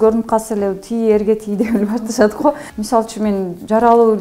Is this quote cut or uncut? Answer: cut